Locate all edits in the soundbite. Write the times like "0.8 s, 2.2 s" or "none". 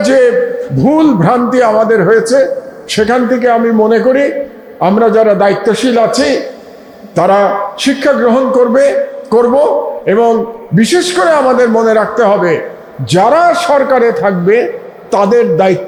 none

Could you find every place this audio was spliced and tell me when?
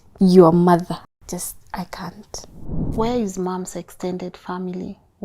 1.2 s, 2.8 s

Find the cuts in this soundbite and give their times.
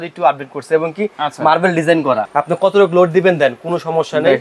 2.3 s

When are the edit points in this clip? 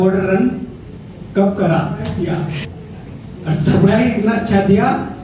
2.1 s

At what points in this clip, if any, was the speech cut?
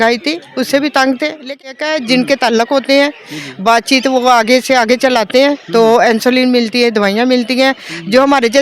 1.4 s

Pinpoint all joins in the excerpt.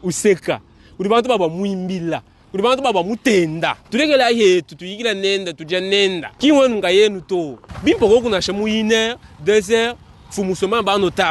3.8 s, 6.3 s, 7.6 s

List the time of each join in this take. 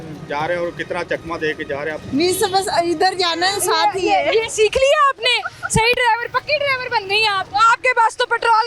2.0 s, 7.4 s

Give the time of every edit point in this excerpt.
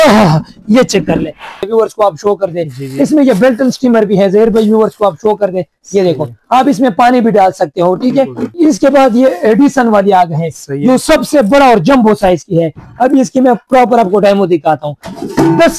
1.6 s, 8.4 s

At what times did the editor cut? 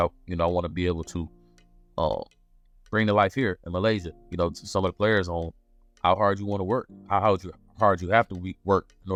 none

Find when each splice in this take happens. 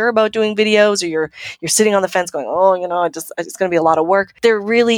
none

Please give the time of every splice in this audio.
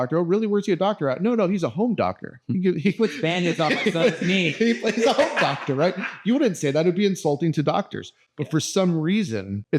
none

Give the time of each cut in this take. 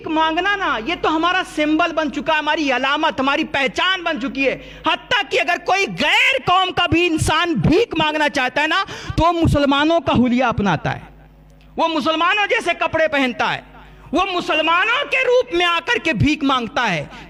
none

